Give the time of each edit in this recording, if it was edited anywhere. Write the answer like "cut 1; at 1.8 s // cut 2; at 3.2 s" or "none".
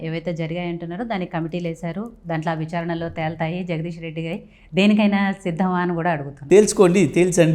cut 1; at 6.3 s